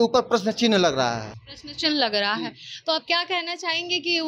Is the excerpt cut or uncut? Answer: uncut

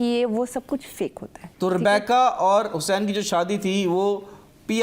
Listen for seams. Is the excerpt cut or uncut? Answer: uncut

